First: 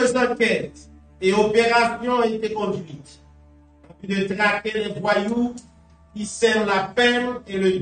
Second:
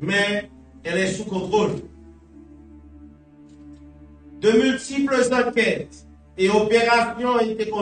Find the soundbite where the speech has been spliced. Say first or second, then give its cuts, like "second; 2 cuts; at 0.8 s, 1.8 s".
second; 2 cuts; at 2.4 s, 4.0 s